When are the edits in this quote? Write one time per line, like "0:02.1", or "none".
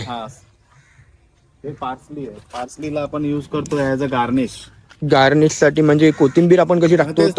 none